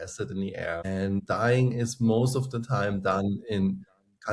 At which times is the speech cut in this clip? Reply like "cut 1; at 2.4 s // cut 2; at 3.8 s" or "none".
cut 1; at 1.2 s

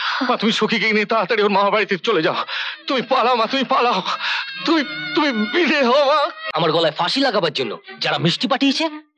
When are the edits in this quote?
cut 1; at 6.4 s

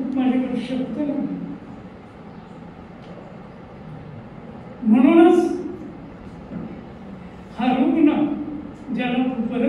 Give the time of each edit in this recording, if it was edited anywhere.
none

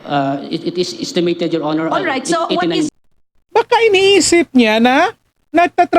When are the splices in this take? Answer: cut 1; at 3.1 s

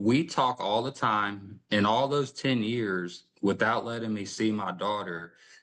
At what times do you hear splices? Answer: none

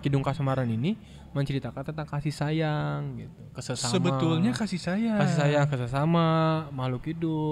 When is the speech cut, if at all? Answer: none

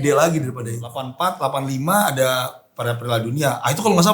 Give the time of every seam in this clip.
cut 1; at 1.0 s

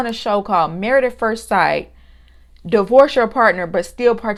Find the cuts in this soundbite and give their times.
none

